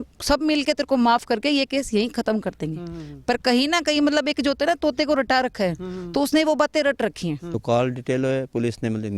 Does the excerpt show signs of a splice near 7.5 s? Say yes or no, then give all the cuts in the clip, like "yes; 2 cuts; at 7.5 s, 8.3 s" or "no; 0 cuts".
yes; 1 cut; at 7.5 s